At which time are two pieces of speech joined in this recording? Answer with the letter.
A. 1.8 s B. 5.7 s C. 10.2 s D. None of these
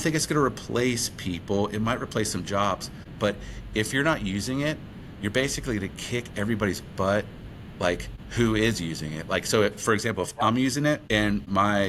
D